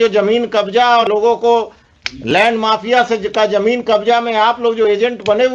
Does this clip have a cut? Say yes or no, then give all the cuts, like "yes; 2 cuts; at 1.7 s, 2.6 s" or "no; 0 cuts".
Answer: yes; 1 cut; at 1.0 s